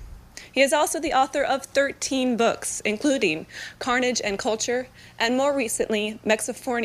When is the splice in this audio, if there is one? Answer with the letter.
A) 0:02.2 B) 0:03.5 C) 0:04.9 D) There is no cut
C